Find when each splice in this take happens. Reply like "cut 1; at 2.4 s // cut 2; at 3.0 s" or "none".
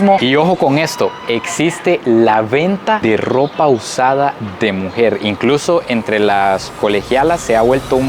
none